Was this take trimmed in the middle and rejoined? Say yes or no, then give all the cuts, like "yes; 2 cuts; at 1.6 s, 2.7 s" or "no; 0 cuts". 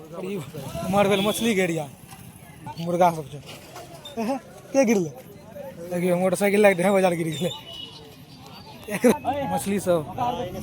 yes; 2 cuts; at 2.7 s, 9.2 s